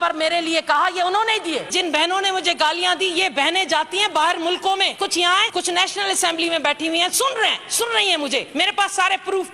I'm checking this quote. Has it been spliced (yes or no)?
yes